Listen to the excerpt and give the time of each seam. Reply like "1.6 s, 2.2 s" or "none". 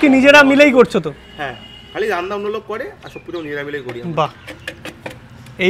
none